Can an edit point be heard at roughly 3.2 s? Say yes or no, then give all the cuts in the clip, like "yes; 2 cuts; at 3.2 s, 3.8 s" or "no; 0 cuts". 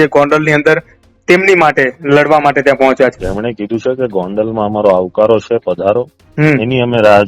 yes; 1 cut; at 3.2 s